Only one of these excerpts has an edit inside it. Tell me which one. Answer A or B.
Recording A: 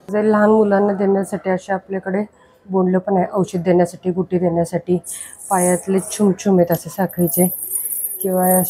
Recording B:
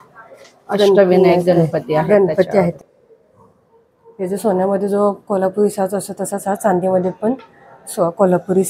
B